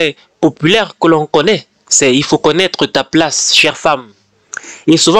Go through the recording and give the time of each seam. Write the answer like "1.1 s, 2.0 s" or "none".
none